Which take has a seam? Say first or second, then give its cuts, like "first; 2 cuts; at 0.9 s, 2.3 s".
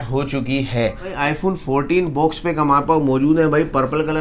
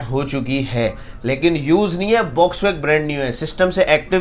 first; 1 cut; at 1.2 s